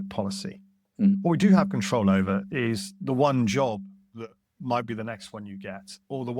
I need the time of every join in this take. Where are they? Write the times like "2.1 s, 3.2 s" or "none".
1.2 s